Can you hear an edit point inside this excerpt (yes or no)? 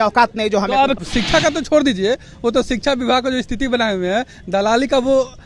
yes